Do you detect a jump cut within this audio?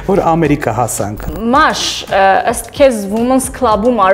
yes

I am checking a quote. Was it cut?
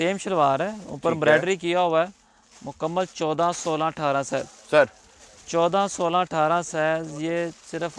no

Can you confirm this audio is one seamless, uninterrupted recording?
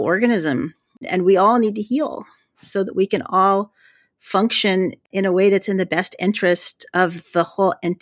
yes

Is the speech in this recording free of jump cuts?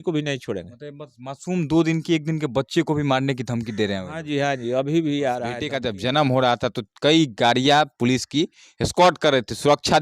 no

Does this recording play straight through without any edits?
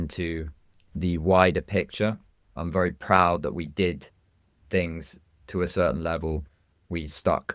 no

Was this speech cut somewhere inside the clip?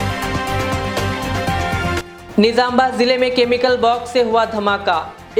no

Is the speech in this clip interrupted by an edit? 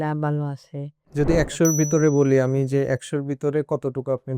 yes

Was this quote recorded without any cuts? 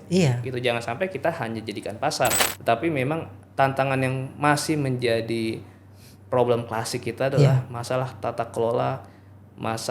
no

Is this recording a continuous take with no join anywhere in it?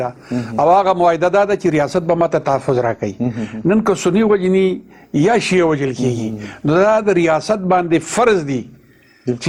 yes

